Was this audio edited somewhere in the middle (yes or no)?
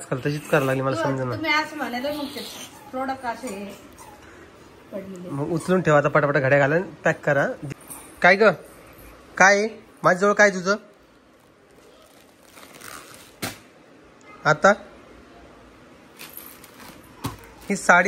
yes